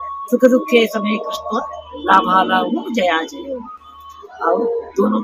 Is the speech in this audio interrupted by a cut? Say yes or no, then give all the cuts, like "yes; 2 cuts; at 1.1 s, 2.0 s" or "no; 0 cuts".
no; 0 cuts